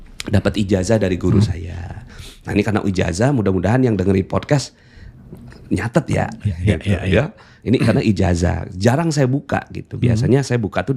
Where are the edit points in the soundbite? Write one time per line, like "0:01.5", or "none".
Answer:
none